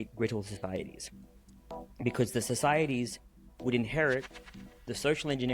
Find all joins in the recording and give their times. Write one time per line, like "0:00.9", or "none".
none